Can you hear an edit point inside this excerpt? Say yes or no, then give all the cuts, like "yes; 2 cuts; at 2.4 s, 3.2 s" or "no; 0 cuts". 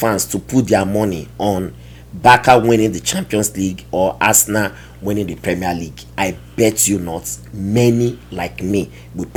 no; 0 cuts